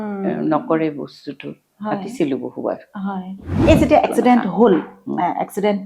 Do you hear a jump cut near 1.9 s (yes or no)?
no